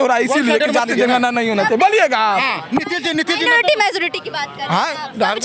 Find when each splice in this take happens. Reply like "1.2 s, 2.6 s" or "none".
none